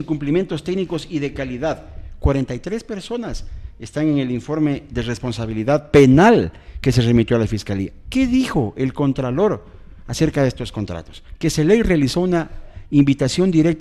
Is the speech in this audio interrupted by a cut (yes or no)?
no